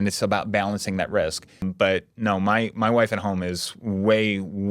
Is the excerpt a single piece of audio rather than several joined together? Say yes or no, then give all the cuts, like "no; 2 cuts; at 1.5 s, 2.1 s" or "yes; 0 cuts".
no; 1 cut; at 1.7 s